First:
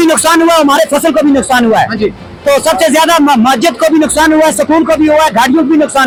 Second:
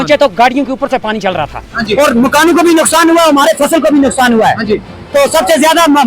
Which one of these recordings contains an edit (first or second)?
second